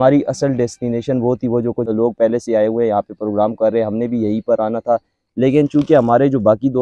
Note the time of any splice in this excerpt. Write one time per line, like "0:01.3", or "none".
0:01.9